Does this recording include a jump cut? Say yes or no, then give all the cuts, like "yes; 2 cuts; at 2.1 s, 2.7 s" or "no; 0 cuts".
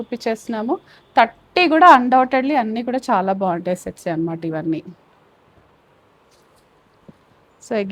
no; 0 cuts